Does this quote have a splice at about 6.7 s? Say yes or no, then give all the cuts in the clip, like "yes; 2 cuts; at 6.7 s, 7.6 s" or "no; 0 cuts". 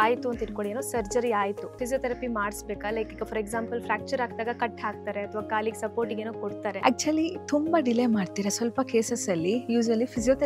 yes; 2 cuts; at 1.8 s, 6.7 s